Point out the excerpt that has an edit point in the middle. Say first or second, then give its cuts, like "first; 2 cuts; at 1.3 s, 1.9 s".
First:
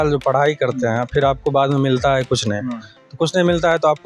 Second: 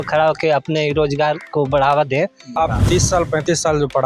second; 1 cut; at 2.5 s